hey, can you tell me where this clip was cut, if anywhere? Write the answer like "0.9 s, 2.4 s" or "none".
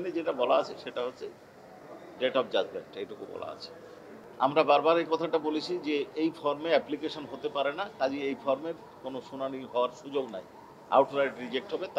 4.2 s